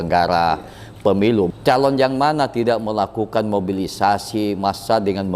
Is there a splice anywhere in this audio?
yes; 1 cut; at 1.5 s

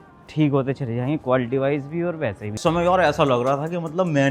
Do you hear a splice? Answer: yes; 1 cut; at 2.6 s

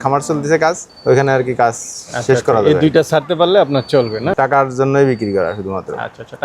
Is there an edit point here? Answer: yes; 2 cuts; at 0.9 s, 4.3 s

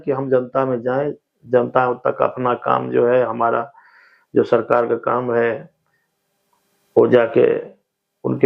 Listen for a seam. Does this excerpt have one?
no; 0 cuts

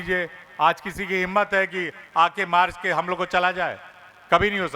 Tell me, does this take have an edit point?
no; 0 cuts

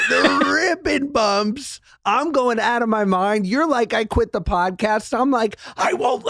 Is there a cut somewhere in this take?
no; 0 cuts

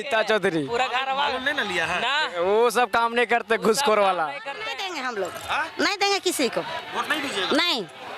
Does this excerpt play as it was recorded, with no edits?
no; 1 cut; at 4.6 s

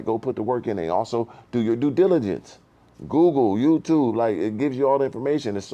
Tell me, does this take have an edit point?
no; 0 cuts

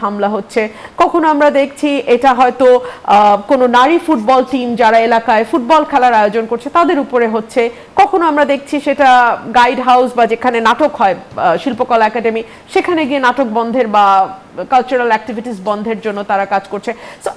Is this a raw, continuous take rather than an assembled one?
yes; 0 cuts

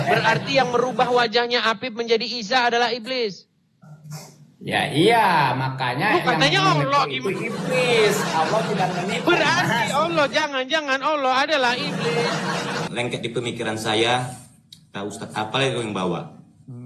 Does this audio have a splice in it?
yes; 1 cut; at 12.9 s

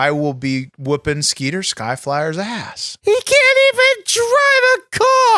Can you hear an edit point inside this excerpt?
no; 0 cuts

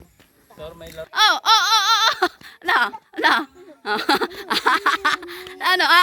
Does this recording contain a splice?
yes; 1 cut; at 1.0 s

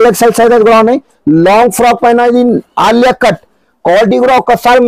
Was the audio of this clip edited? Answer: no; 0 cuts

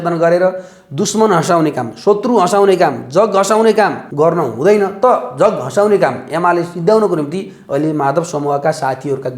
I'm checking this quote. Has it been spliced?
yes; 1 cut; at 4.0 s

